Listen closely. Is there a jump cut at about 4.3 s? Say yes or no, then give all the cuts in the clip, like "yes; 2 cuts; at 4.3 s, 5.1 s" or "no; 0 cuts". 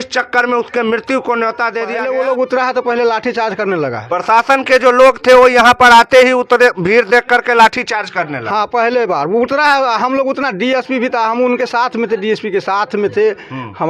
no; 1 cut; at 1.9 s